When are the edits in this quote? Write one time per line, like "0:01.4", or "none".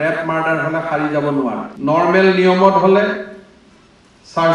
0:01.7